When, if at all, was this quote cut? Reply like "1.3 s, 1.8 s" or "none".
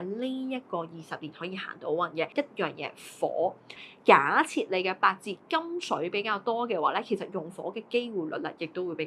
2.3 s, 3.8 s